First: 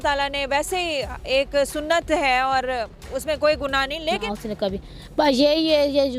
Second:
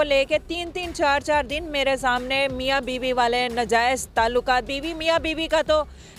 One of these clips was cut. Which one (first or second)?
first